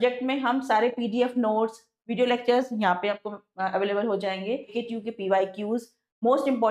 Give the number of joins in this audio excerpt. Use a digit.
1